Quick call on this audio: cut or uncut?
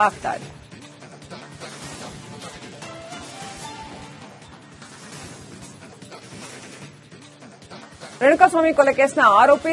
uncut